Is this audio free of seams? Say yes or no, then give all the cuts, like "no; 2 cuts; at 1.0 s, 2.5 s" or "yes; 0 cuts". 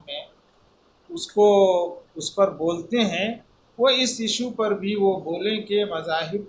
yes; 0 cuts